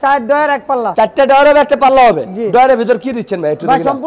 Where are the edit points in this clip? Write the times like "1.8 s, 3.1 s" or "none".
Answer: none